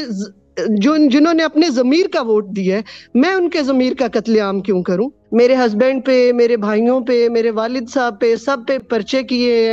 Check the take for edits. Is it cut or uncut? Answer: cut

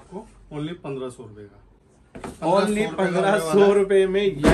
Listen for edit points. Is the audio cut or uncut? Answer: uncut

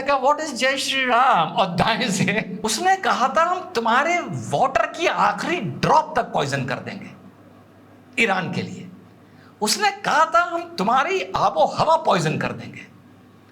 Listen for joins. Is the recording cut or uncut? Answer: cut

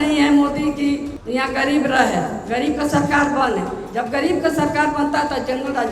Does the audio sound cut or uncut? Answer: cut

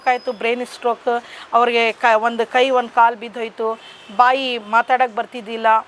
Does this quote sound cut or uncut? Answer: uncut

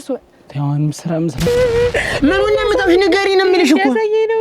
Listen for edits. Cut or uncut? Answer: cut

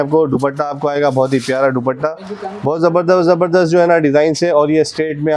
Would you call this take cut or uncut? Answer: uncut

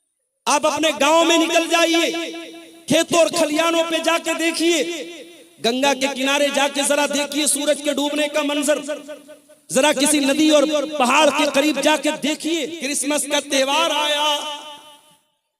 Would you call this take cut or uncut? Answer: cut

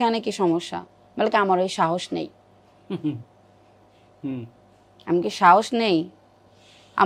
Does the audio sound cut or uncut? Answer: uncut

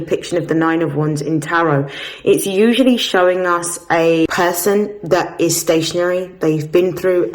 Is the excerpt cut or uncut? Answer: cut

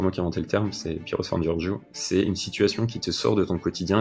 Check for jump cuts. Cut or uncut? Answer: uncut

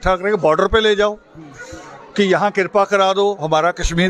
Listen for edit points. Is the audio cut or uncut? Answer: uncut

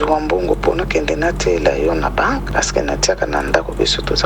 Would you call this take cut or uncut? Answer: cut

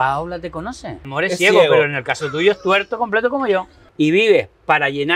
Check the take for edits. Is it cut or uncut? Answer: cut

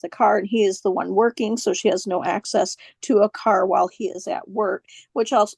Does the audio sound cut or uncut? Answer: uncut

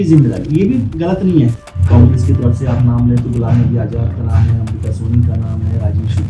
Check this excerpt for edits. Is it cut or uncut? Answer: cut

